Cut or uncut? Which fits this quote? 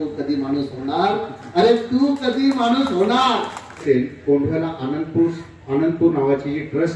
cut